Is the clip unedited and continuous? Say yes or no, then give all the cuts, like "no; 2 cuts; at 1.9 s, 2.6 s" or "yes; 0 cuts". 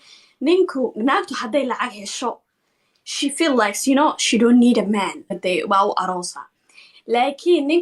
no; 1 cut; at 5.4 s